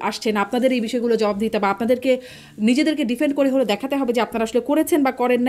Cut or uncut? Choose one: uncut